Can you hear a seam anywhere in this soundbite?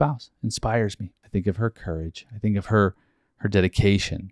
yes; 1 cut; at 1.1 s

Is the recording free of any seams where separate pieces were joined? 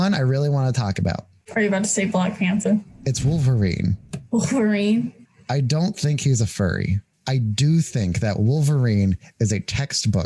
no; 3 cuts; at 1.4 s, 5.2 s, 7.1 s

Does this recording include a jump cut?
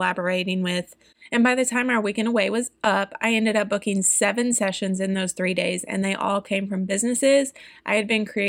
yes; 1 cut; at 1.0 s

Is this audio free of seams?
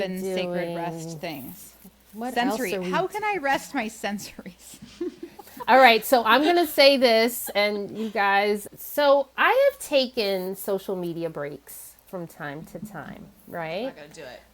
no; 1 cut; at 8.6 s

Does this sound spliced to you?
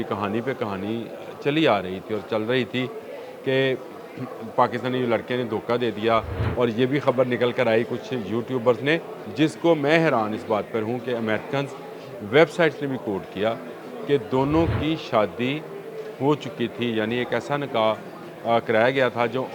yes; 2 cuts; at 6.4 s, 9.2 s

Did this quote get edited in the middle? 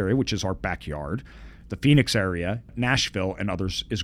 yes; 1 cut; at 2.7 s

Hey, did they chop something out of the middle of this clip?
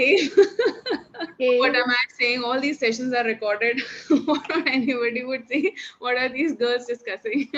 yes; 1 cut; at 1.3 s

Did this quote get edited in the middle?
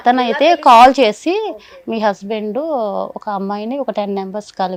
no; 0 cuts

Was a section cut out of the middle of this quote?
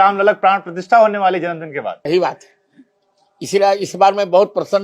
yes; 1 cut; at 2.1 s

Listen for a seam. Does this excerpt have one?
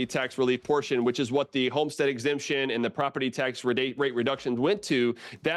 no; 0 cuts

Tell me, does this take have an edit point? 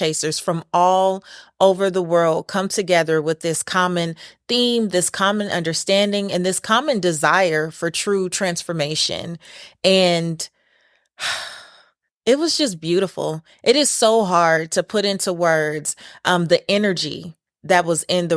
no; 0 cuts

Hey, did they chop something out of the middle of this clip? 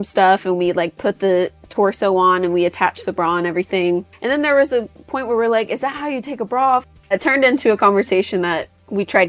yes; 2 cuts; at 4.1 s, 7.1 s

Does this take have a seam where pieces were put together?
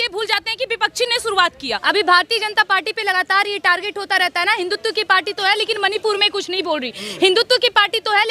yes; 1 cut; at 1.8 s

